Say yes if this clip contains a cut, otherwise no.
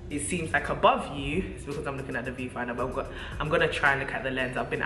no